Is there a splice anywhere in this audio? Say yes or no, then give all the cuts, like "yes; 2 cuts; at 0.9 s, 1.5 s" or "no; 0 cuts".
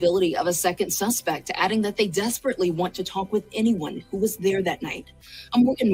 no; 0 cuts